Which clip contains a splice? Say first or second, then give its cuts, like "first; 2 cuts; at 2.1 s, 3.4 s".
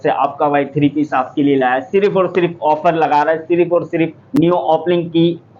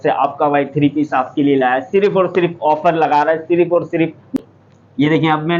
second; 1 cut; at 4.2 s